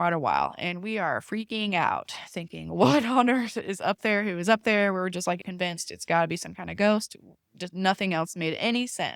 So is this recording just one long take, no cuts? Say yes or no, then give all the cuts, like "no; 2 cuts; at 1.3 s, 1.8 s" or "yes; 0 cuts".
no; 1 cut; at 5.5 s